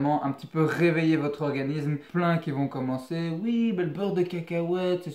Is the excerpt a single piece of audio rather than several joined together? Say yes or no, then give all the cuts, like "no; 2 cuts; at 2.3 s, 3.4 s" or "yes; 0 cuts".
no; 1 cut; at 2.0 s